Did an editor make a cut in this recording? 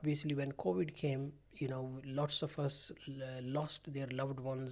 no; 0 cuts

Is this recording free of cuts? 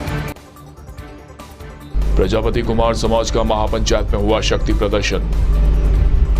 no; 1 cut; at 1.9 s

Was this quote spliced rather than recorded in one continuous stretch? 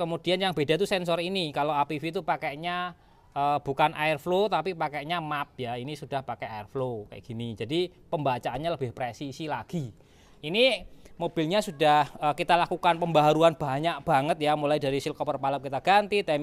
no; 0 cuts

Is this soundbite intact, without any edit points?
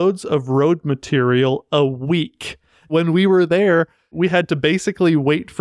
no; 2 cuts; at 2.9 s, 4.1 s

